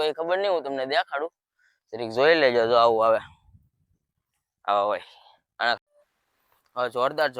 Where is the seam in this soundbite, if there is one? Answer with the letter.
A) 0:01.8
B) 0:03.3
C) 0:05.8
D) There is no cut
C